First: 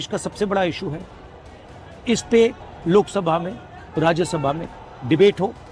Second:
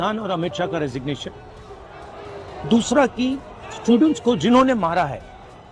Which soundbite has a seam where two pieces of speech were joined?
first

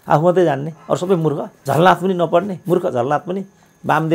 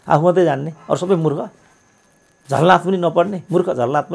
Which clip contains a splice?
first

